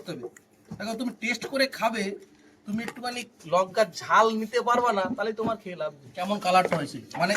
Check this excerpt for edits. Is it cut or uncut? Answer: cut